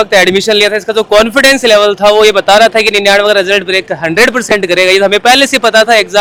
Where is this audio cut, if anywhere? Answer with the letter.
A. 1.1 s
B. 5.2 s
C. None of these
C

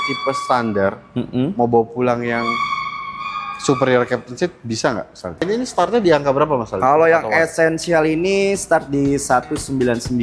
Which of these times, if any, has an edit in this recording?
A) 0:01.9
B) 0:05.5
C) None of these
B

